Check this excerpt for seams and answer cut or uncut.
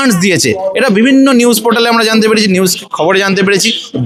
uncut